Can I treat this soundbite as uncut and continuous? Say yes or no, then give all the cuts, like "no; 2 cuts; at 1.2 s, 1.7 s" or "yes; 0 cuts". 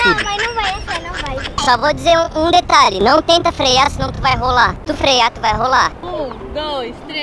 no; 2 cuts; at 1.6 s, 6.0 s